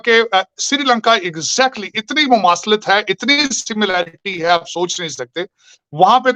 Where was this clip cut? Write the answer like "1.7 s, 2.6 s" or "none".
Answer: none